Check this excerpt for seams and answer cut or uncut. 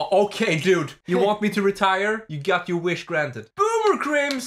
cut